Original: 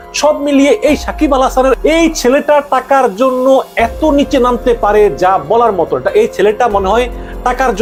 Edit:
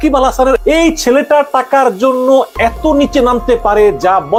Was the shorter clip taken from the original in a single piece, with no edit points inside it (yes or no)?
yes